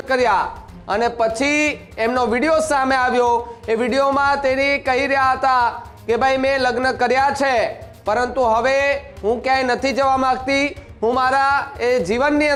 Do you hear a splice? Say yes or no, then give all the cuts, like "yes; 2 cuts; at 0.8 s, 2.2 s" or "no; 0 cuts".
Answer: no; 0 cuts